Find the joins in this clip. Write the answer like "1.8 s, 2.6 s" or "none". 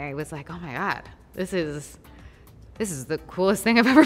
none